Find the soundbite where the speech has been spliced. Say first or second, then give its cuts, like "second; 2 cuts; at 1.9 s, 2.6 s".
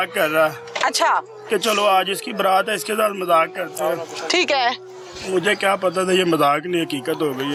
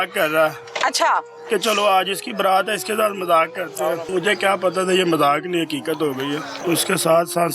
second; 2 cuts; at 4.0 s, 6.5 s